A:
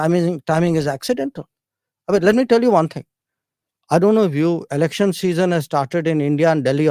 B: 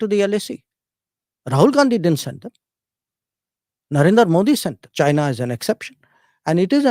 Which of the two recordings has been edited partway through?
B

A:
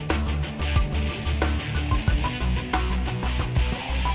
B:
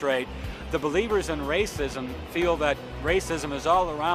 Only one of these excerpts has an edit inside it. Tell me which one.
A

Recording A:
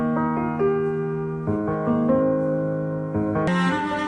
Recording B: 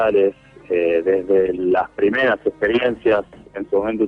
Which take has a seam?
B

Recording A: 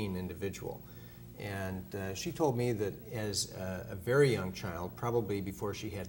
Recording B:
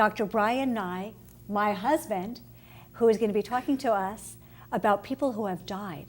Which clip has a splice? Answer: B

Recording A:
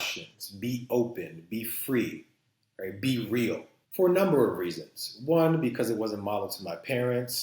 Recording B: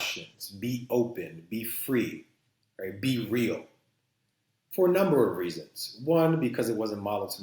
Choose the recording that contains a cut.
A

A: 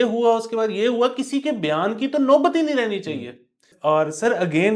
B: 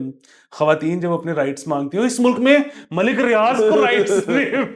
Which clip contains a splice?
A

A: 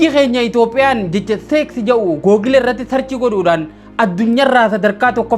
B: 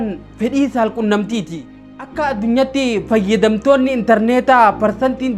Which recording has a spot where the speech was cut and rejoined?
B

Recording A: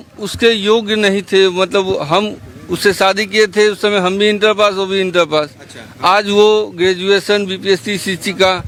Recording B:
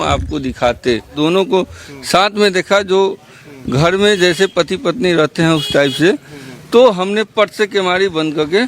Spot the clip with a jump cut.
B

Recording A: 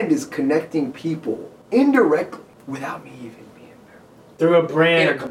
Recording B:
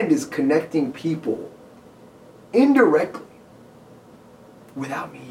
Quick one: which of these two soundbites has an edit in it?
A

